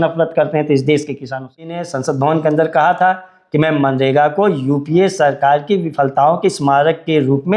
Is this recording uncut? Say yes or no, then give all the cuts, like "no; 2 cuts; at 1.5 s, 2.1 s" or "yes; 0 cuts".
no; 1 cut; at 1.9 s